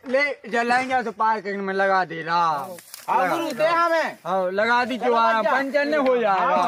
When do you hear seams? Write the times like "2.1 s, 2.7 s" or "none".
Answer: none